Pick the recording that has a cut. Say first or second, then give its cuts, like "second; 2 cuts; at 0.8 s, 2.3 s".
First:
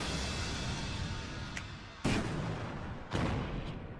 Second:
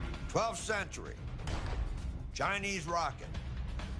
first; 1 cut; at 1.9 s